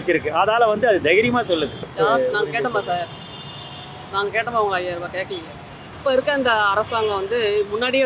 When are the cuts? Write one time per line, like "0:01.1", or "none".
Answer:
0:01.9
0:05.8